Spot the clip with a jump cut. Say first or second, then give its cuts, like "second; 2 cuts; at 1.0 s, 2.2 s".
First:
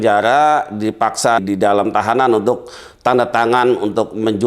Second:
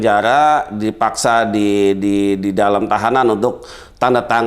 first; 1 cut; at 1.4 s